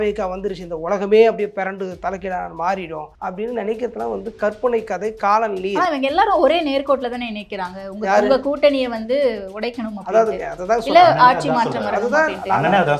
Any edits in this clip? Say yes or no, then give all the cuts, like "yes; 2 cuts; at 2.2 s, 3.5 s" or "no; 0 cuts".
yes; 1 cut; at 3.1 s